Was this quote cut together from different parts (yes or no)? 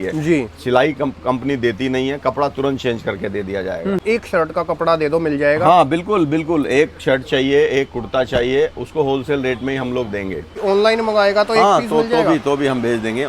yes